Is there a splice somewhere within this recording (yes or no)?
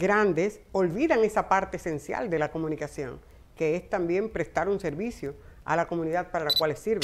no